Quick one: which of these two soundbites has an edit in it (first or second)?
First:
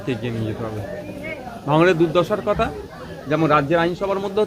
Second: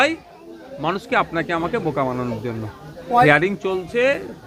second